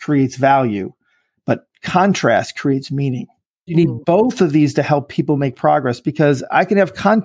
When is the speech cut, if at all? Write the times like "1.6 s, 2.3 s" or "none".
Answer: 3.7 s